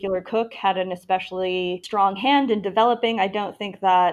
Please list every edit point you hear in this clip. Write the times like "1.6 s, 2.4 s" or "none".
1.8 s